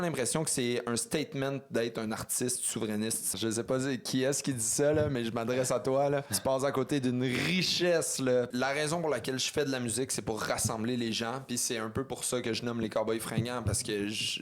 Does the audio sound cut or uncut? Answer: cut